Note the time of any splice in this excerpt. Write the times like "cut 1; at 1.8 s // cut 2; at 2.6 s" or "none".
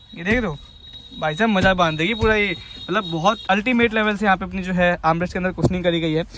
none